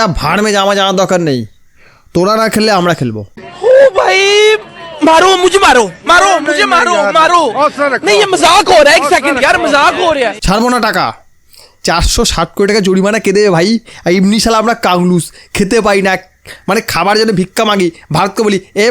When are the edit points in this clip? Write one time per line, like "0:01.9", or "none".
none